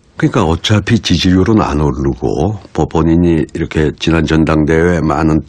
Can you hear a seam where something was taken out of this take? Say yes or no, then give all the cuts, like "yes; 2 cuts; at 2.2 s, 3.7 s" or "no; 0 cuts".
yes; 1 cut; at 2.9 s